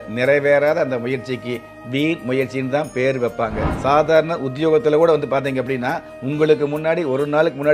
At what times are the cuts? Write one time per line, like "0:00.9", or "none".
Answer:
0:03.7